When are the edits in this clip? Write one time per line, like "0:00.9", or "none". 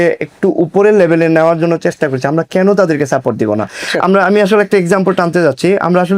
none

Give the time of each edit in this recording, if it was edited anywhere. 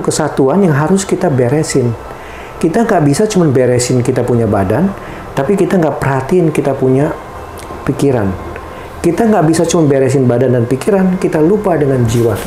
none

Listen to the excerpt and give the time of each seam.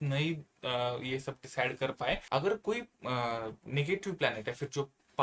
0:02.2

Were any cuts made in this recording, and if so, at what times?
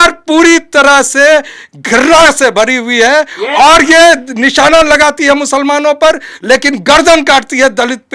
none

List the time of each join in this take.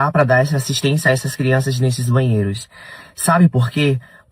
0:02.8

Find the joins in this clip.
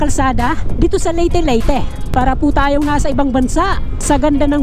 none

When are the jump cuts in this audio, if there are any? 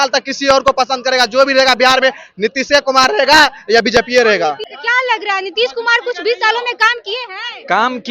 0:04.7

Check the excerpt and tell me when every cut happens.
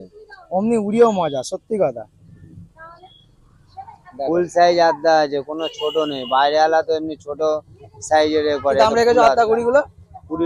none

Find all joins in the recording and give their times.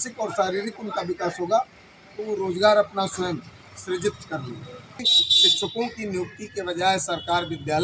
0:05.2

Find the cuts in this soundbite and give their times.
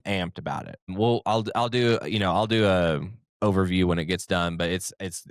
0:00.9

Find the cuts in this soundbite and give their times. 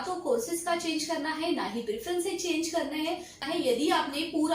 0:03.4

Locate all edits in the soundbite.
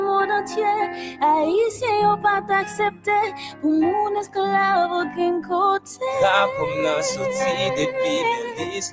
0:01.3

